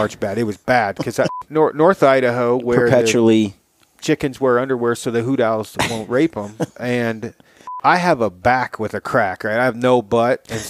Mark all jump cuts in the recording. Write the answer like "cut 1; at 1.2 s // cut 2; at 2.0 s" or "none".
cut 1; at 1.4 s // cut 2; at 7.6 s